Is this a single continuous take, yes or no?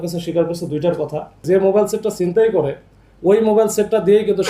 no